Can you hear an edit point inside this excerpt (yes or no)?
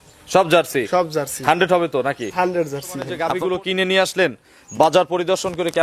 yes